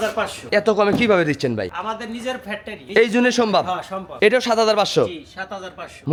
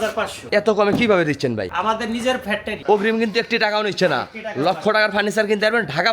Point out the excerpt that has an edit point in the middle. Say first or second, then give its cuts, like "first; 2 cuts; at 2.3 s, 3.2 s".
second; 1 cut; at 2.7 s